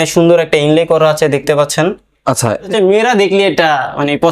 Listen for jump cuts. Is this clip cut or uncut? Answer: cut